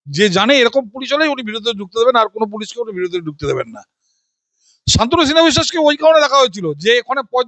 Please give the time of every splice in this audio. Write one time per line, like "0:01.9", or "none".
none